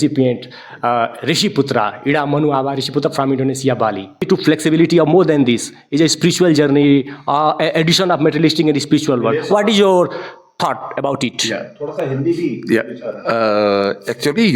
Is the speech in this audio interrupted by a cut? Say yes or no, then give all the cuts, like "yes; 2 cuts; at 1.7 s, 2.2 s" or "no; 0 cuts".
yes; 1 cut; at 4.2 s